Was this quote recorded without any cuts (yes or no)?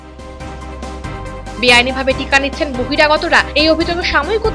yes